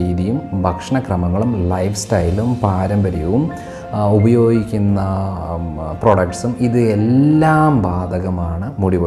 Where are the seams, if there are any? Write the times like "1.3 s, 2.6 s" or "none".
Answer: none